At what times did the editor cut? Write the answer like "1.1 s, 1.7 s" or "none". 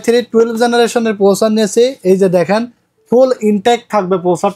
none

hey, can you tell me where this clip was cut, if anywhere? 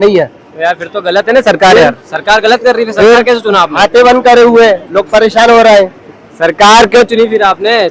none

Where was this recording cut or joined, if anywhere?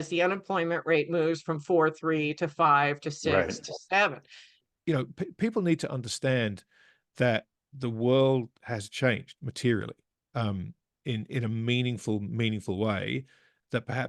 4.7 s

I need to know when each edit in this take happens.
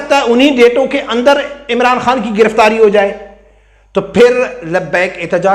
none

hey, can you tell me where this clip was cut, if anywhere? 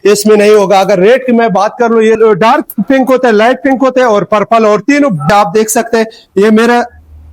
2.2 s, 5.3 s

